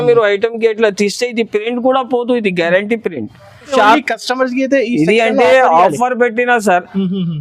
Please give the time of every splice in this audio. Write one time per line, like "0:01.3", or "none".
0:03.7